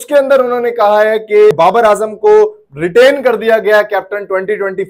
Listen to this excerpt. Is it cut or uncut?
cut